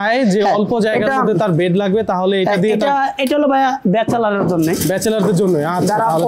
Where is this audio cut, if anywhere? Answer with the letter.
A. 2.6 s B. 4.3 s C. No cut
C